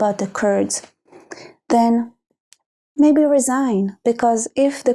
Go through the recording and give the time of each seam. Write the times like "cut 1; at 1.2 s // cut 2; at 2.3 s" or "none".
none